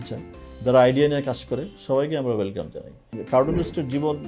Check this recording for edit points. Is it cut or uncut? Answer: cut